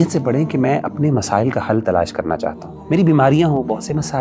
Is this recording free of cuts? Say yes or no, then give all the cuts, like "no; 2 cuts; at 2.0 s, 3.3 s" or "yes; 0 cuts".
no; 1 cut; at 2.7 s